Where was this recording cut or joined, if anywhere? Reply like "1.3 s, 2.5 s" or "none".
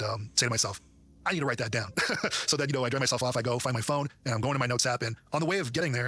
none